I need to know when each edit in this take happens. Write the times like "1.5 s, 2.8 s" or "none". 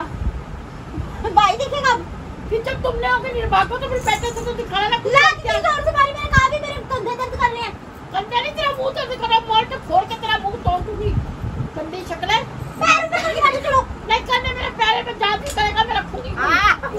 none